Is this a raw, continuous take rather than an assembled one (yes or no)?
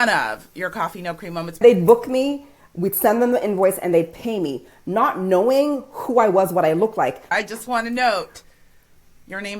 no